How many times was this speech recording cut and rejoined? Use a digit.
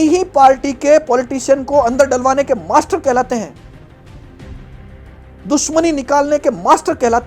2